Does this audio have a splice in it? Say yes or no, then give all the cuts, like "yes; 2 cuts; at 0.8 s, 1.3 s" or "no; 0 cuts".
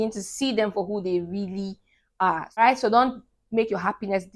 yes; 1 cut; at 2.6 s